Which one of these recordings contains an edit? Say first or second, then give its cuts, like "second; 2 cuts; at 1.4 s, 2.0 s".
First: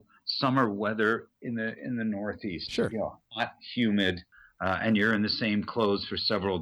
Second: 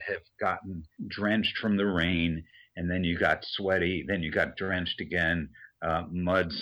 second; 1 cut; at 1.0 s